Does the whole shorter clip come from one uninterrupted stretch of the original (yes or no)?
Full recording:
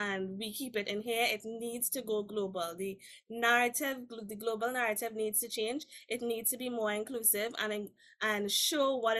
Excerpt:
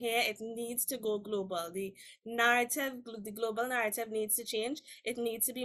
yes